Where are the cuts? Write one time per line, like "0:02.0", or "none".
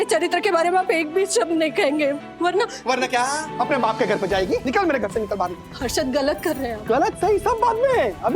0:03.5
0:04.6